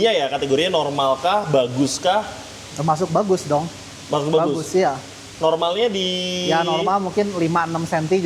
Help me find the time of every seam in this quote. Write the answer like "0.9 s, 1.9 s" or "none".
none